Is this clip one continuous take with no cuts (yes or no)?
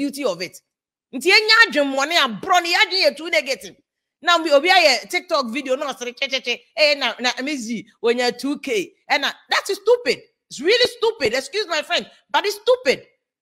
yes